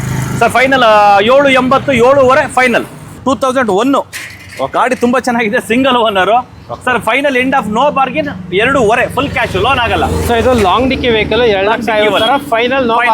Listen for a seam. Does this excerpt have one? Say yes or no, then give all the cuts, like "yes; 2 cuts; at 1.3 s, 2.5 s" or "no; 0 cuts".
yes; 1 cut; at 3.2 s